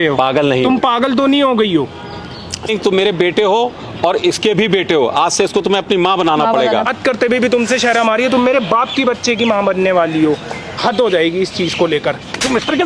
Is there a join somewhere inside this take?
yes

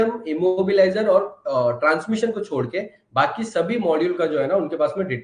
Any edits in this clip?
no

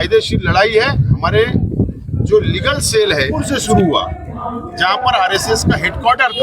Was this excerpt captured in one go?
no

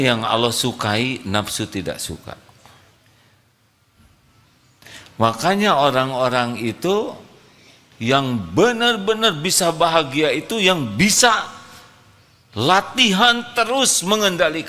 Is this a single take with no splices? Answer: yes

